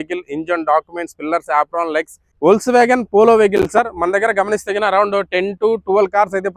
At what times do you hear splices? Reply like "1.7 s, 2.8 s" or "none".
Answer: 2.2 s